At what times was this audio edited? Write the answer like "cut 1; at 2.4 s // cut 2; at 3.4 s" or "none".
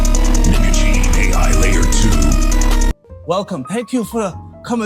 cut 1; at 3.1 s